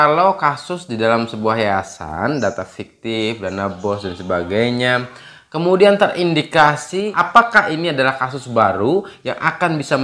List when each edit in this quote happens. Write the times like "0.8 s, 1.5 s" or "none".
7.1 s

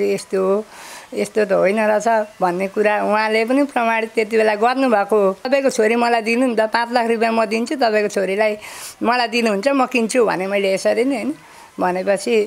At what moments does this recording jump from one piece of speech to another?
5.5 s

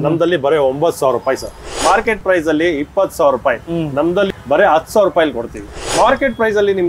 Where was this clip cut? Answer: 1.8 s, 4.3 s, 5.7 s

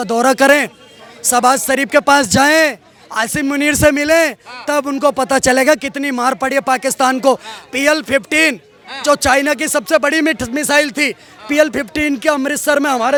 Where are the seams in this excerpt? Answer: none

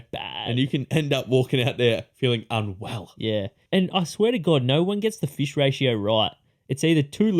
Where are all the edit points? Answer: 3.6 s

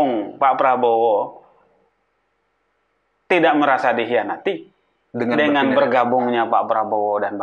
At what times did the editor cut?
none

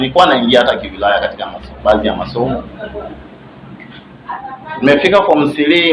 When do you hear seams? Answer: none

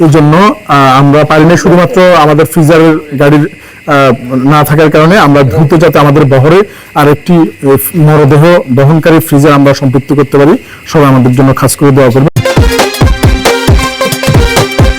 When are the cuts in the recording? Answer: 12.3 s

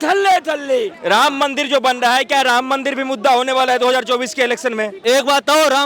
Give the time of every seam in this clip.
0.9 s, 5.0 s

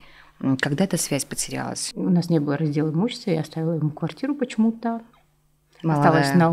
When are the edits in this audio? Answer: 1.8 s

